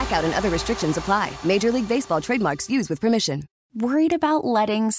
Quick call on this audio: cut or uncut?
cut